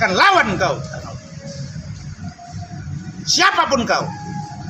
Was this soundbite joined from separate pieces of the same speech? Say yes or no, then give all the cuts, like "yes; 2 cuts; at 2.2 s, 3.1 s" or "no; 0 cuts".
no; 0 cuts